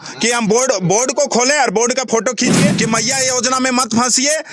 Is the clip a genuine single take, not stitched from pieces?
no; 1 cut; at 2.8 s

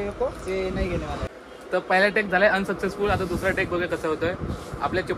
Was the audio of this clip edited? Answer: yes; 1 cut; at 1.3 s

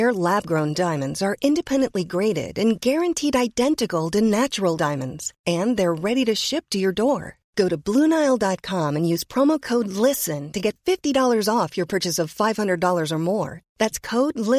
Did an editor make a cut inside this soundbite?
no; 0 cuts

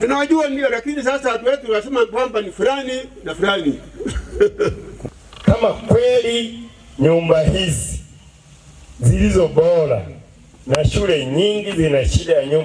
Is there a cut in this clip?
yes; 1 cut; at 5.0 s

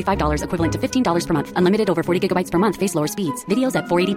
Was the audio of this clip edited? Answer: no; 0 cuts

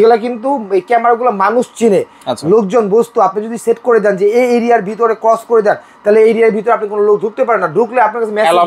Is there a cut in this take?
no; 0 cuts

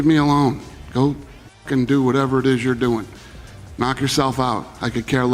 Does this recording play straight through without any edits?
yes; 0 cuts

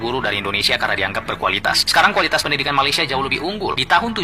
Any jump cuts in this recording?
no; 0 cuts

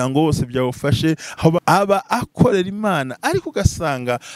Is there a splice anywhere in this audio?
yes; 1 cut; at 1.6 s

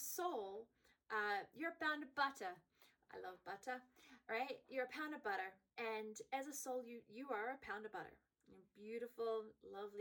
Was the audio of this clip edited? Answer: yes; 1 cut; at 5.6 s

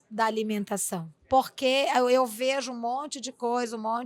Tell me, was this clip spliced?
yes; 1 cut; at 1.1 s

